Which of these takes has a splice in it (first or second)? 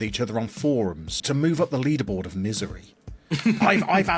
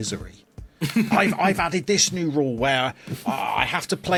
first